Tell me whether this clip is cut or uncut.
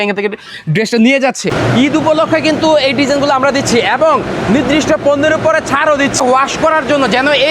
cut